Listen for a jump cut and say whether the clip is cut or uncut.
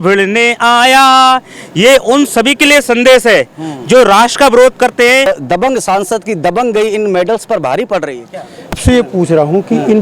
cut